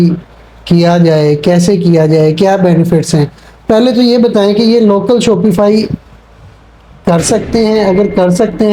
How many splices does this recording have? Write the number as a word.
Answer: zero